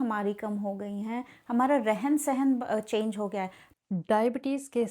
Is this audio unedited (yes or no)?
no